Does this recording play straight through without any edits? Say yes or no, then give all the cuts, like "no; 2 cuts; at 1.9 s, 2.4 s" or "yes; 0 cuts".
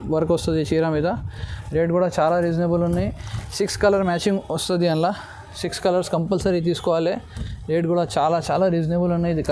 yes; 0 cuts